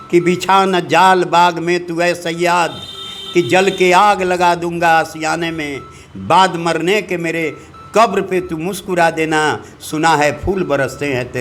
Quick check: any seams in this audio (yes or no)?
no